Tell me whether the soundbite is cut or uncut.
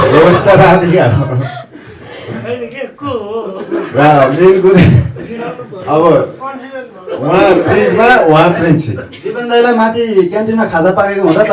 uncut